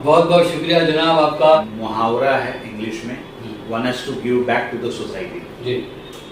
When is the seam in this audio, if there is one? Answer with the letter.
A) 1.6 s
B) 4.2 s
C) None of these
A